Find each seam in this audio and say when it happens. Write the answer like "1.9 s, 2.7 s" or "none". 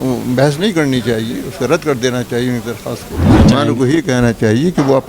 3.3 s